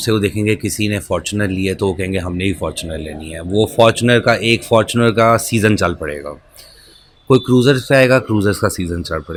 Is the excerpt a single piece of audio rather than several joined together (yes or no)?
yes